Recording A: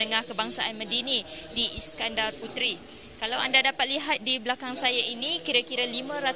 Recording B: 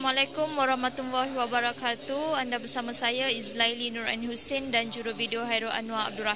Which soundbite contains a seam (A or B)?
B